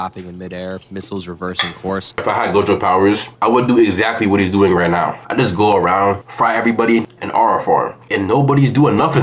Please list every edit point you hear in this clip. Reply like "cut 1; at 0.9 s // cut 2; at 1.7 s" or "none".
cut 1; at 2.2 s // cut 2; at 3.3 s // cut 3; at 7.0 s